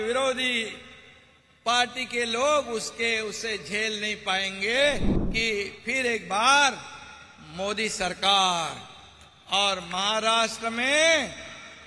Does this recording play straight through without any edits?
no; 1 cut; at 5.1 s

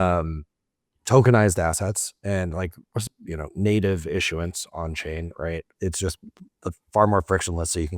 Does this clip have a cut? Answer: yes; 1 cut; at 5.7 s

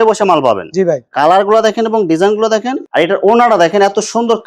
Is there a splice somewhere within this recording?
yes; 1 cut; at 2.8 s

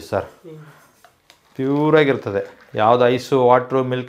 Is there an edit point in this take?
no; 0 cuts

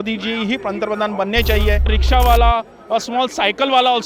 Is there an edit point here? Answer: yes; 1 cut; at 2.0 s

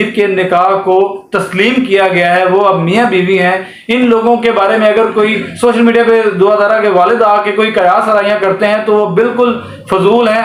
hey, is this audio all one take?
yes; 0 cuts

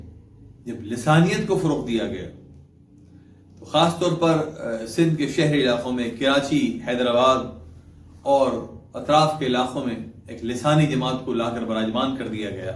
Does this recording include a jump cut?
no; 0 cuts

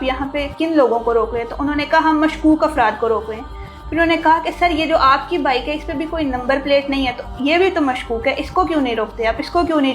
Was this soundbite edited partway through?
no; 0 cuts

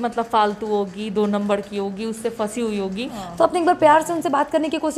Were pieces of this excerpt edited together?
yes; 1 cut; at 3.2 s

